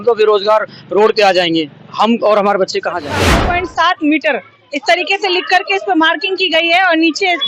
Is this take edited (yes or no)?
yes